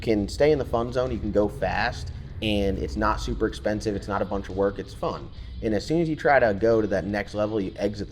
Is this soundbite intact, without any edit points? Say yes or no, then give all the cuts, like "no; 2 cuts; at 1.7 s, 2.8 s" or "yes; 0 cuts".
yes; 0 cuts